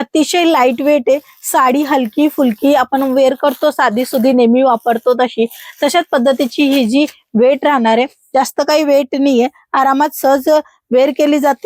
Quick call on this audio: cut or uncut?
uncut